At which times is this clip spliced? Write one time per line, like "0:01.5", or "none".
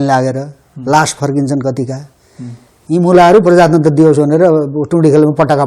none